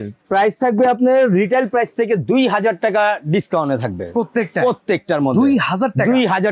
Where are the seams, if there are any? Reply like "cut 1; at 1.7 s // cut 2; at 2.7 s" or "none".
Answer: none